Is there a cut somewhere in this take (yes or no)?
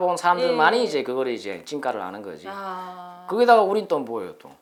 no